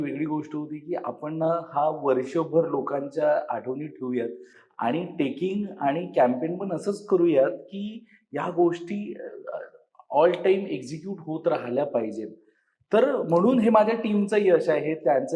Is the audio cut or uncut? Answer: uncut